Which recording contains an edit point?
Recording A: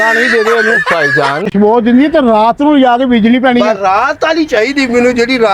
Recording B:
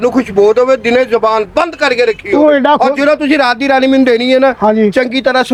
A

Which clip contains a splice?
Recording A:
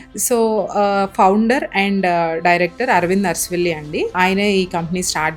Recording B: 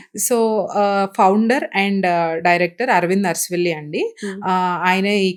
A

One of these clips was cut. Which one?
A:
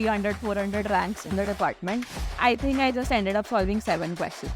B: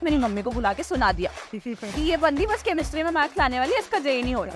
A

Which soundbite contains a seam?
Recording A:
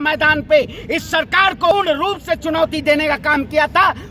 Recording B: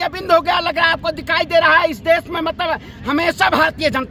A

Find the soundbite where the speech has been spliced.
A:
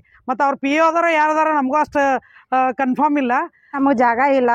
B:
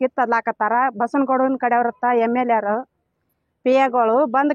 A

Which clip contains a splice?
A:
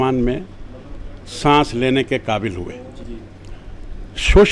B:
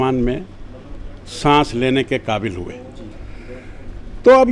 A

